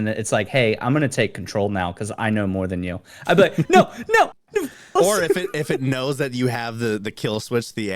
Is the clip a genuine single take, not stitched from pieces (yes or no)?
no